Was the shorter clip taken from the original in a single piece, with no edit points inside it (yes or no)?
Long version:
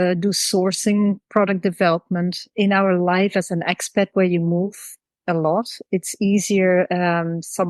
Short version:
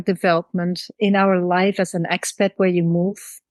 yes